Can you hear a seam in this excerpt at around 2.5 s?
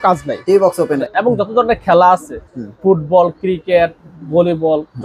no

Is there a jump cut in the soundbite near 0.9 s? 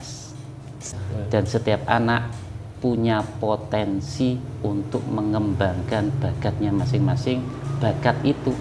yes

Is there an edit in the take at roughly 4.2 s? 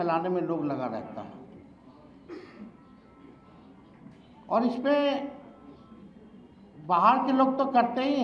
no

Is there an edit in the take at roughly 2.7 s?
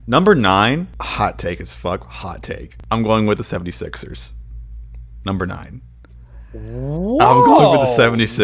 yes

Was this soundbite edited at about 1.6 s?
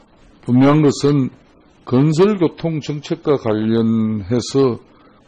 no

